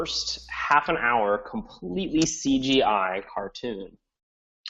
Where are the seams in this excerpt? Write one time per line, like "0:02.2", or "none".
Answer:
0:03.5